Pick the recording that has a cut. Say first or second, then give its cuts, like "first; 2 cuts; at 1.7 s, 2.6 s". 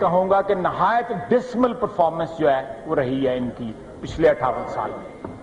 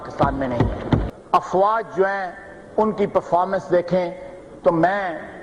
second; 1 cut; at 1.1 s